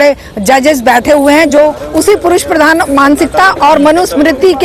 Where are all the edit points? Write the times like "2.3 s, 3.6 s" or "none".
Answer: none